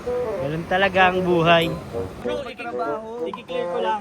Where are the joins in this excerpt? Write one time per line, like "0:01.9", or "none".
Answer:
0:02.1